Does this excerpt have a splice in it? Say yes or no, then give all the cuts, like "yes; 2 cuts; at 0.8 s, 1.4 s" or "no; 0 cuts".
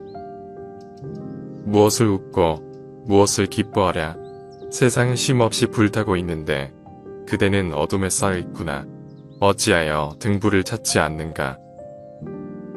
yes; 2 cuts; at 0.9 s, 11.9 s